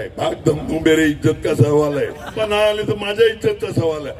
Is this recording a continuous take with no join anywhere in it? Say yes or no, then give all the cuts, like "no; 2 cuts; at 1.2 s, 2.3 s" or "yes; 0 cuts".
no; 1 cut; at 2.4 s